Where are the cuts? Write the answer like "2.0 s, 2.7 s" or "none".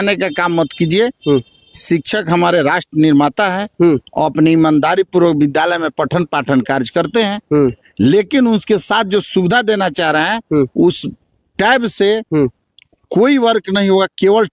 none